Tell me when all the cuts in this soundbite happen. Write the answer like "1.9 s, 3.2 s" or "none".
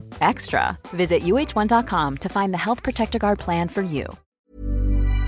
4.2 s